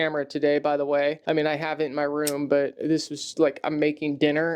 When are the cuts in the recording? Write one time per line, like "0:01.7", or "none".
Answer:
0:01.2